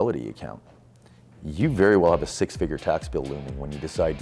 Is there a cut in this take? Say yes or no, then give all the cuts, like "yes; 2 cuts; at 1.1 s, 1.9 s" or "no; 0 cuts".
no; 0 cuts